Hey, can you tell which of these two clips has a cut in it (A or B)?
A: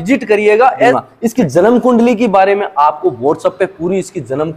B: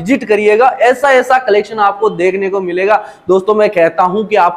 A